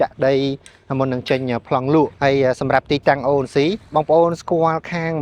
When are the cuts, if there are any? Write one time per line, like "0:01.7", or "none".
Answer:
0:02.1